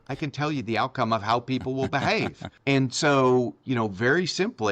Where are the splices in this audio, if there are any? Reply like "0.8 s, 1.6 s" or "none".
2.4 s

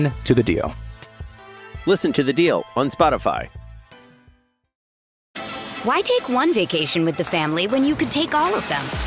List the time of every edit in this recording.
5.4 s

